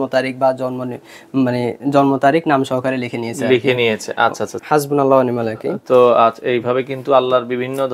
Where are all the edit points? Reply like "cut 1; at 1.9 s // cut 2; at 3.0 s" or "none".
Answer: cut 1; at 4.5 s